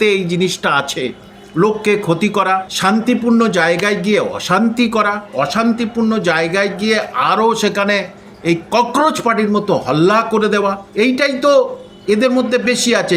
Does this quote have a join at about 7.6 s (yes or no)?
no